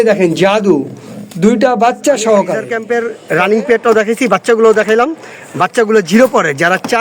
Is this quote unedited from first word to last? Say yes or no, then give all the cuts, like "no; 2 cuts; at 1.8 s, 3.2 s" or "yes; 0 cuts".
no; 1 cut; at 2.7 s